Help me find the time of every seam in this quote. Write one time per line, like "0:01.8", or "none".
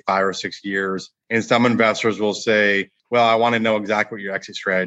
0:01.1
0:02.9